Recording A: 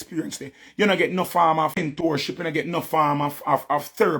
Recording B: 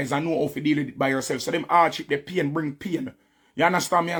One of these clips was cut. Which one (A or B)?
A